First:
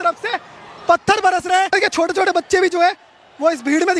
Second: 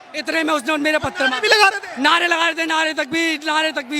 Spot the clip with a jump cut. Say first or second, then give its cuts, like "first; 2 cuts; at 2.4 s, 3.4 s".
first; 1 cut; at 1.7 s